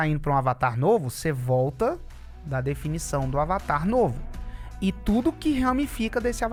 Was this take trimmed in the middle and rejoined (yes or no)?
no